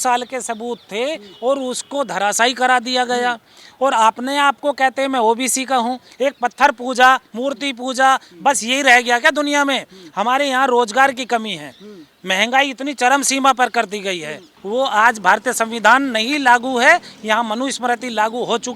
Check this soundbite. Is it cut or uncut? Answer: cut